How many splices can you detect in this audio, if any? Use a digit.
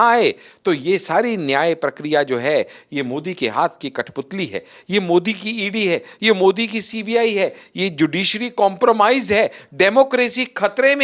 0